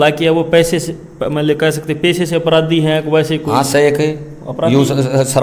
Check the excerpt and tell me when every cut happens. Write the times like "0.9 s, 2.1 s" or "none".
none